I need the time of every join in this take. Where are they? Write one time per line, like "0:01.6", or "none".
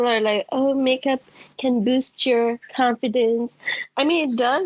none